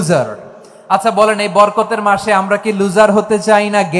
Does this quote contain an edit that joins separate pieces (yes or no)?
no